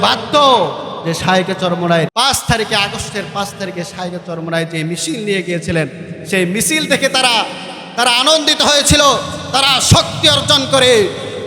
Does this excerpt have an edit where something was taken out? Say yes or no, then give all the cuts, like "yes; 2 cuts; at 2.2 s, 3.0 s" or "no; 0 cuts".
yes; 1 cut; at 2.1 s